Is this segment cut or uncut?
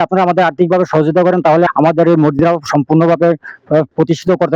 uncut